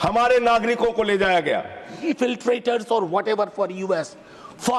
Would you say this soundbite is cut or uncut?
cut